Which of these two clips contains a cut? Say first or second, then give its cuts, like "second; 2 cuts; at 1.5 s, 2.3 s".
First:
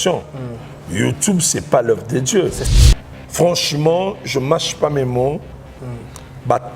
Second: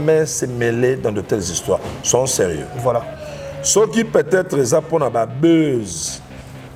first; 1 cut; at 2.8 s